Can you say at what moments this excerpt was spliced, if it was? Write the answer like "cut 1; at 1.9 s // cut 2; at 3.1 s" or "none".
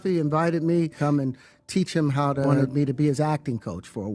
cut 1; at 0.9 s // cut 2; at 2.5 s